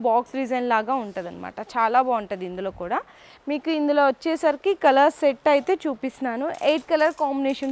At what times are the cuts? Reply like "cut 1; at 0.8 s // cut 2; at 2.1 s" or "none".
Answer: none